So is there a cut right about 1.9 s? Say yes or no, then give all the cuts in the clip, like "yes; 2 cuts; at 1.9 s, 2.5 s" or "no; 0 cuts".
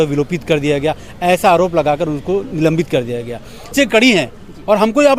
no; 1 cut; at 3.7 s